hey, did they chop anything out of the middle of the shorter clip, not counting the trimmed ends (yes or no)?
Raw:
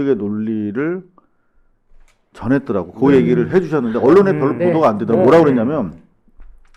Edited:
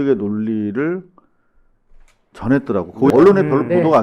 yes